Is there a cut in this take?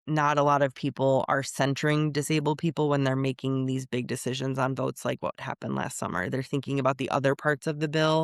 no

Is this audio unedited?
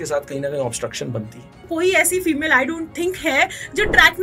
no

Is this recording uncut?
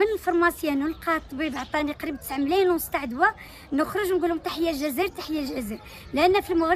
yes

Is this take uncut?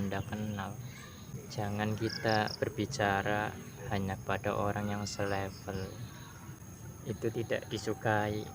no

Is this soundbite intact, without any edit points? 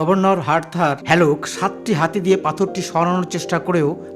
no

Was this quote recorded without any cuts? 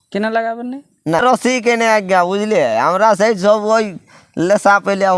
no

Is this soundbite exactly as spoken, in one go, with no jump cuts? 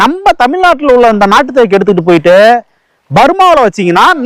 yes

